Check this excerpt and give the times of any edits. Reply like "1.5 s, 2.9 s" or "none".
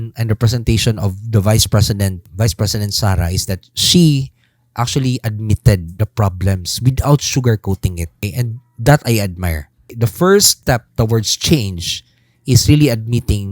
2.3 s, 5.9 s, 8.2 s, 9.9 s, 10.5 s